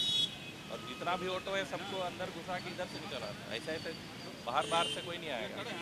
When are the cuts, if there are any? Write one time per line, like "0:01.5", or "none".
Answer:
none